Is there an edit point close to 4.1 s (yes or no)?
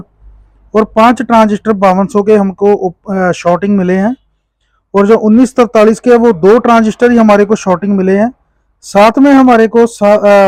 no